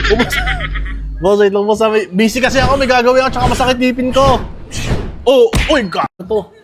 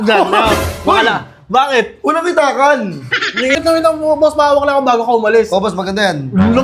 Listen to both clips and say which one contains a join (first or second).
second